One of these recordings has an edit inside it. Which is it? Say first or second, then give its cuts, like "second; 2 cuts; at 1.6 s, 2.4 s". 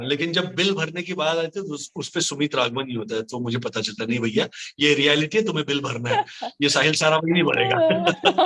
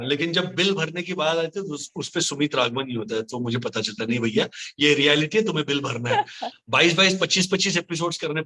second; 1 cut; at 6.4 s